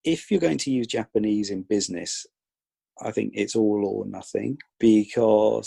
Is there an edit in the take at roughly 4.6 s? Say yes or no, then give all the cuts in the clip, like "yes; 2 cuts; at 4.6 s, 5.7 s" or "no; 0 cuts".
yes; 1 cut; at 4.6 s